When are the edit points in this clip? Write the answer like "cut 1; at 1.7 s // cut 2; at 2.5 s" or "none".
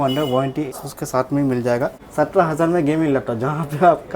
cut 1; at 0.8 s // cut 2; at 2.0 s